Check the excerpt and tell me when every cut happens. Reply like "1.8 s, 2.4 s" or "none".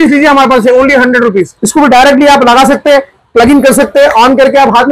1.6 s